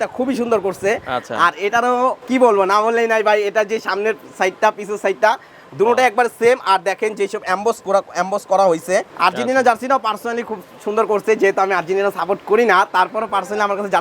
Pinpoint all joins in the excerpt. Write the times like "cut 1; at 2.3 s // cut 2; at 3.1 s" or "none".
cut 1; at 2.2 s // cut 2; at 9.1 s